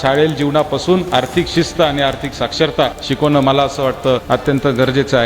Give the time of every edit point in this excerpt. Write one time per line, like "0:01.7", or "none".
0:03.0
0:04.2